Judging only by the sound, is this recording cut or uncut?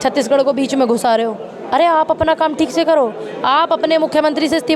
uncut